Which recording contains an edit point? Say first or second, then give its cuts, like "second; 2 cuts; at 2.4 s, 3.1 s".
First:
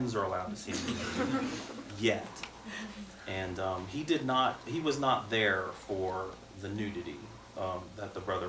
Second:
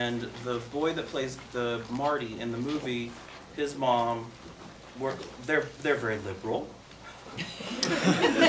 second; 1 cut; at 1.8 s